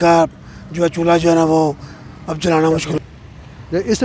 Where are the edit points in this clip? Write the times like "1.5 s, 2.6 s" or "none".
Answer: 3.0 s